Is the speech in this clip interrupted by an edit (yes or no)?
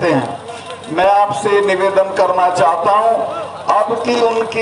no